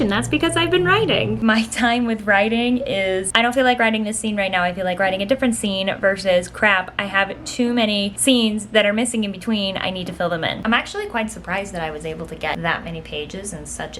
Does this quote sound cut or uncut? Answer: cut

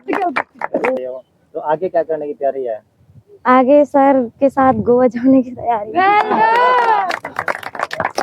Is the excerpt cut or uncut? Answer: cut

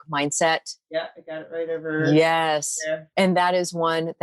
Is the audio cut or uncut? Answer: cut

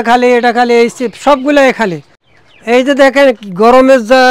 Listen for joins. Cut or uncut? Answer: cut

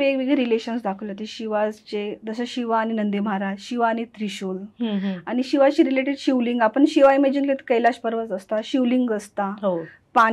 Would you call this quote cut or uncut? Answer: uncut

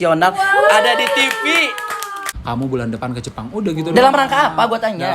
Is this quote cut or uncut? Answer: cut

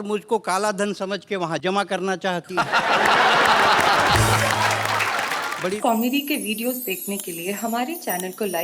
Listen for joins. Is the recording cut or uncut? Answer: cut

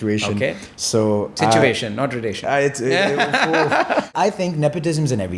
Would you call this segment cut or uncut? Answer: cut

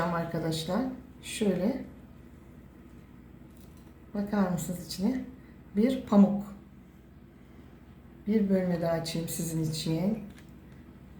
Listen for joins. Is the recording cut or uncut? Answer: uncut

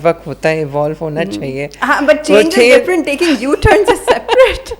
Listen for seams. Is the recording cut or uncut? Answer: uncut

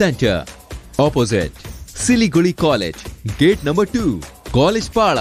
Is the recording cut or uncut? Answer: uncut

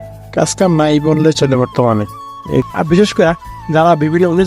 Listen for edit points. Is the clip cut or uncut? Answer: cut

